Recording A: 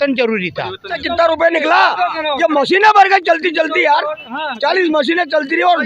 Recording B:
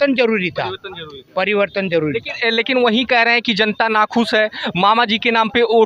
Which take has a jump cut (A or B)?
A